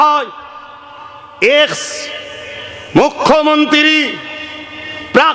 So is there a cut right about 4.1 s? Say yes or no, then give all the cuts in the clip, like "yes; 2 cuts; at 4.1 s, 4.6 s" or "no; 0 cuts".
no; 0 cuts